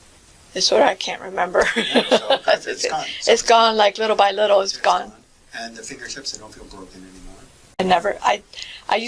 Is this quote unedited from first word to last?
no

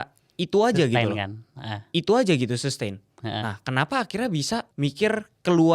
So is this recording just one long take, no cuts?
no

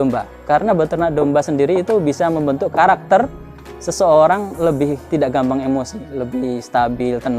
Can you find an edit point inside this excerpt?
yes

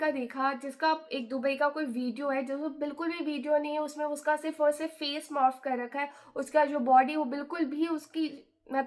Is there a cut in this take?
no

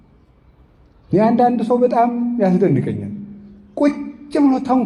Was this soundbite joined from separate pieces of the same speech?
no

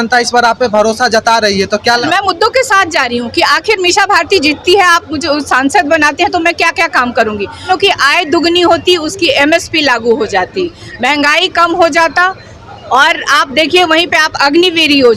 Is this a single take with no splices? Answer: no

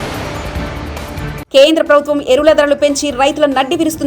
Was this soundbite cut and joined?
yes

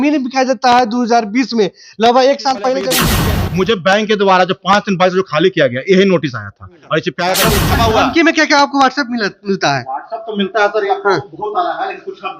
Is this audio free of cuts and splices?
no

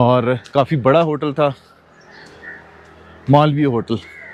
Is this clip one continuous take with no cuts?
yes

